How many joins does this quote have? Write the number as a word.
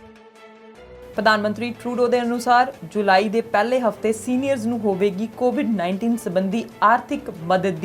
one